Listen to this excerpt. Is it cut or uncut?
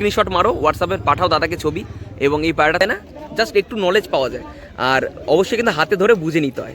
cut